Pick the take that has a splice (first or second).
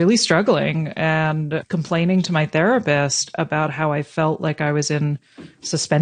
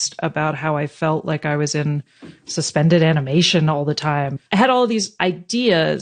second